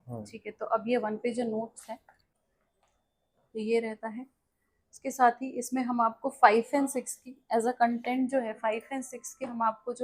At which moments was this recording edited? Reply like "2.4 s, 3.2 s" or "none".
none